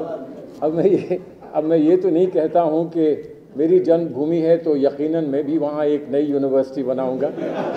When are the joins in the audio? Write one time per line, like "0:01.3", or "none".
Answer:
none